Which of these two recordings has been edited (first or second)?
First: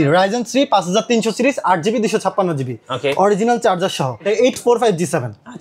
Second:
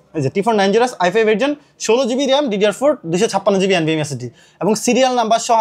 first